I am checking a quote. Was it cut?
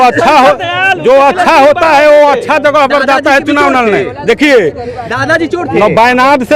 no; 0 cuts

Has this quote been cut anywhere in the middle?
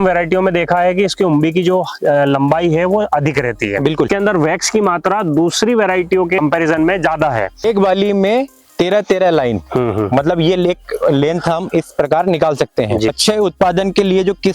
yes; 3 cuts; at 4.1 s, 7.6 s, 13.2 s

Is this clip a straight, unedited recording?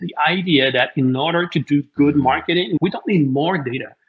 no; 1 cut; at 2.8 s

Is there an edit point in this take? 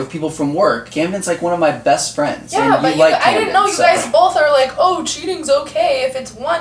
yes; 2 cuts; at 0.8 s, 2.4 s

